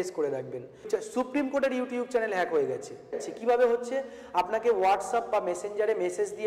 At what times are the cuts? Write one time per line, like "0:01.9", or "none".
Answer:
0:00.9
0:03.2